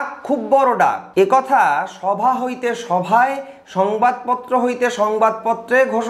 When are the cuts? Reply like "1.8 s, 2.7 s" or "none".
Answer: 1.0 s